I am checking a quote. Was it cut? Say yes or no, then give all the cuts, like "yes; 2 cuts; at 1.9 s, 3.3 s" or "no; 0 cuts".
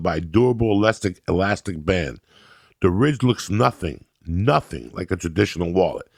no; 0 cuts